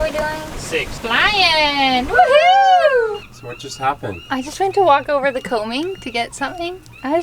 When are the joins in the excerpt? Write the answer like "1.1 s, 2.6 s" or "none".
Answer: 0.9 s, 3.3 s